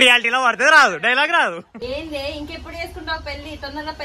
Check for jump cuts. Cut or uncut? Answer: cut